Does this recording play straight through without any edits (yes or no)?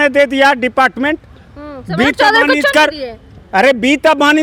yes